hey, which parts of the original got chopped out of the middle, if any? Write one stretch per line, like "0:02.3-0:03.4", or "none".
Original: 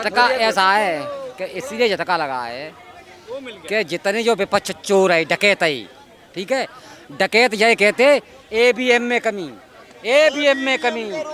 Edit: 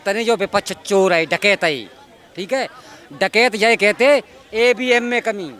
none